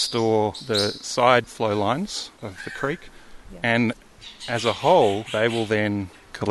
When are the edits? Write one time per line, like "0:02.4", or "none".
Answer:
none